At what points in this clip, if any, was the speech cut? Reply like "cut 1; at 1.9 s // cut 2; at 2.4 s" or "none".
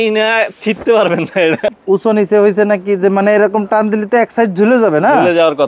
cut 1; at 1.6 s